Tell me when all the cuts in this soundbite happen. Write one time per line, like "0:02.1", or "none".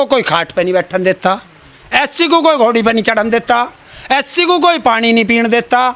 none